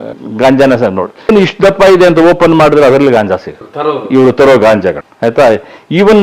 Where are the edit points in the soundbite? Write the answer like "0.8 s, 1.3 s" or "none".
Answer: 1.3 s, 3.8 s